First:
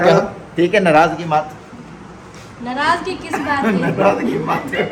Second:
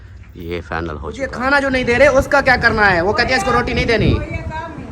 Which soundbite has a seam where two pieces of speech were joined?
second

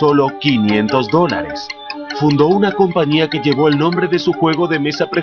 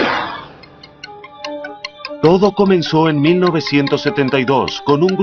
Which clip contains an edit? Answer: first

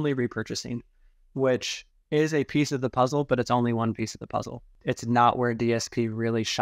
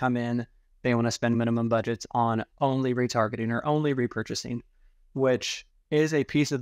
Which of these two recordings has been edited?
first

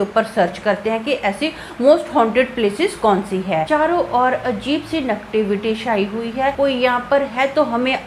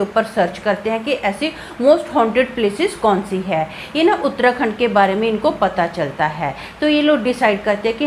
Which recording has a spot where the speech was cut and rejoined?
first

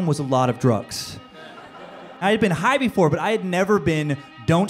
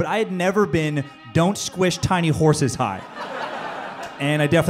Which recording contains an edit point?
first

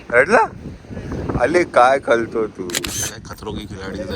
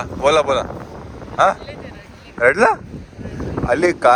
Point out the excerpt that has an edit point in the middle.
first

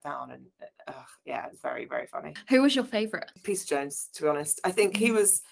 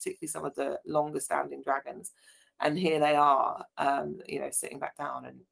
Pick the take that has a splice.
first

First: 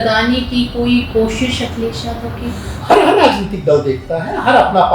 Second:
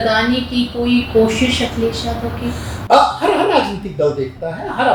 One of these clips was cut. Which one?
first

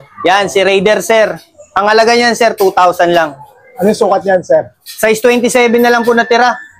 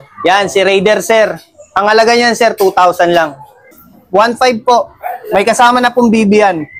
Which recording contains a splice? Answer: second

